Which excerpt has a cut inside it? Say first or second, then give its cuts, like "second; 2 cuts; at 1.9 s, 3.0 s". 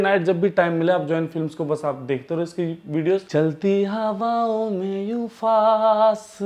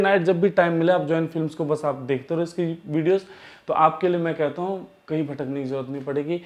first; 1 cut; at 3.3 s